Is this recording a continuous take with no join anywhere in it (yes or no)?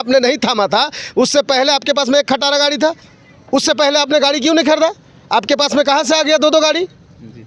yes